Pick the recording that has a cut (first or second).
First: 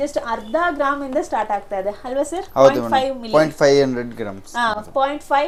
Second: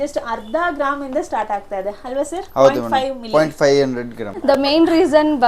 second